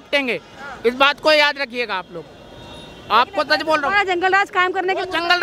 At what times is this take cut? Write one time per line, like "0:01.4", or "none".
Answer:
none